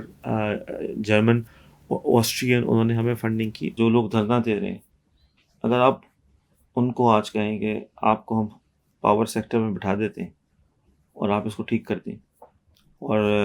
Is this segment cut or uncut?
cut